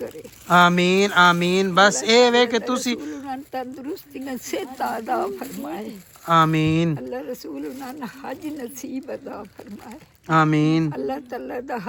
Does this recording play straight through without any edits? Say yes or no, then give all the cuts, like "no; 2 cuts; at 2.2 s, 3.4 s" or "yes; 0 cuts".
yes; 0 cuts